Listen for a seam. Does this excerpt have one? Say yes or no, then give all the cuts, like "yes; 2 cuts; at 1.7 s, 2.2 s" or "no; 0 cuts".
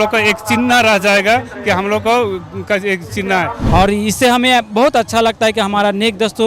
yes; 1 cut; at 3.6 s